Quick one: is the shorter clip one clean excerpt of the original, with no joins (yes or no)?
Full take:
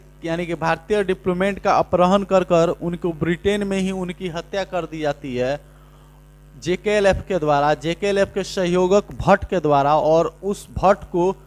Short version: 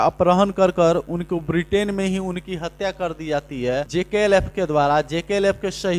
no